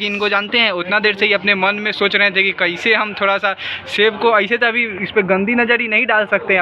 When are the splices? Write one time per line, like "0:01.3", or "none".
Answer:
none